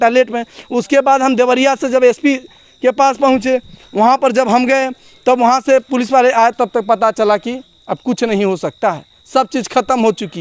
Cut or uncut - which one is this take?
uncut